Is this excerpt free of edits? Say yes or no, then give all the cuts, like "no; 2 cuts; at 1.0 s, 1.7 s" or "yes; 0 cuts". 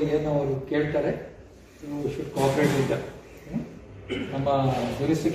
yes; 0 cuts